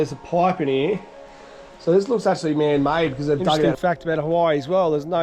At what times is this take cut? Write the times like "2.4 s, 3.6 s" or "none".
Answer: 3.7 s